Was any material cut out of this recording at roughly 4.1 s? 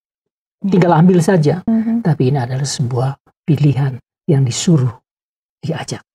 no; 1 cut; at 1.7 s

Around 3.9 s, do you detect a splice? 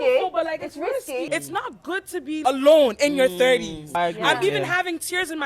yes; 3 cuts; at 1.3 s, 2.4 s, 3.9 s

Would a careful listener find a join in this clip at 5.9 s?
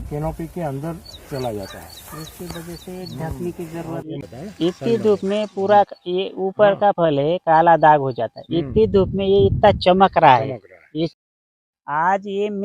no; 1 cut; at 11.1 s

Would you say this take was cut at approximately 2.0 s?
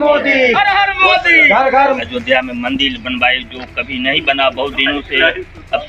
yes; 1 cut; at 2.0 s

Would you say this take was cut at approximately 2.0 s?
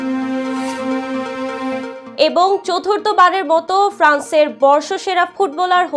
yes; 1 cut; at 2.0 s

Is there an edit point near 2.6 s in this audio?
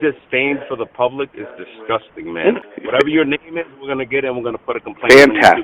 yes; 1 cut; at 2.6 s

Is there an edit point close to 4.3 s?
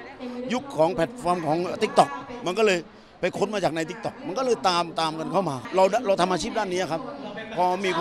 no; 1 cut; at 5.6 s

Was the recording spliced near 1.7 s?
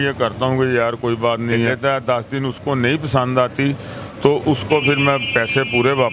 yes; 1 cut; at 1.7 s

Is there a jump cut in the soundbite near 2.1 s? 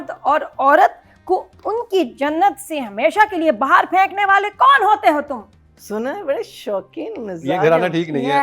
no; 1 cut; at 5.6 s

